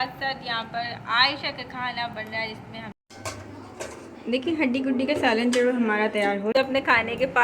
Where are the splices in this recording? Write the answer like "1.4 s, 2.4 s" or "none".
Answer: 2.9 s, 6.5 s